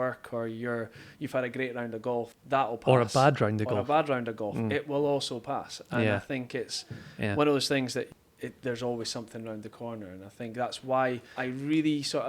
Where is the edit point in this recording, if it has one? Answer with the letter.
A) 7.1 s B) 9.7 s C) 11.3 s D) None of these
C